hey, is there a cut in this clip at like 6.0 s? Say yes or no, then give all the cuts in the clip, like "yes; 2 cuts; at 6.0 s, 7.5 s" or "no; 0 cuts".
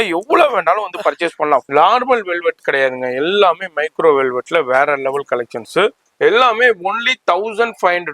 yes; 2 cuts; at 1.7 s, 6.0 s